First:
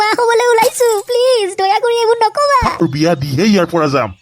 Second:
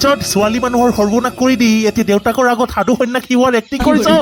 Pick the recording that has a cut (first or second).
first